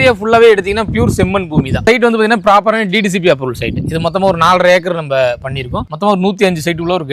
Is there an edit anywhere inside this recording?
yes; 2 cuts; at 1.8 s, 5.8 s

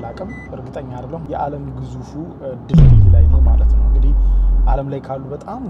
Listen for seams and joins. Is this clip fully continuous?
yes; 0 cuts

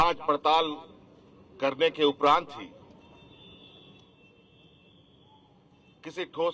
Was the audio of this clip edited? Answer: no; 0 cuts

